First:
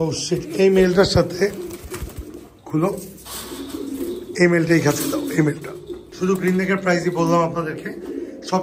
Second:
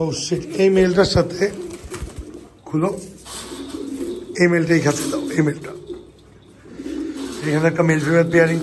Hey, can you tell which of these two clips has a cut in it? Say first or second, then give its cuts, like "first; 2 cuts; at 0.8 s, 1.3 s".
first; 1 cut; at 6.0 s